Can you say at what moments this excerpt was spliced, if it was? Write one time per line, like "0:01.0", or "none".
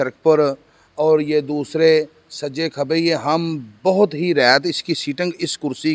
none